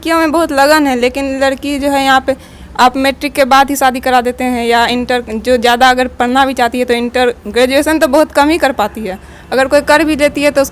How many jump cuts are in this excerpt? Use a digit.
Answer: 0